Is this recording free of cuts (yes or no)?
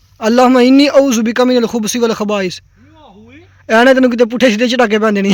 yes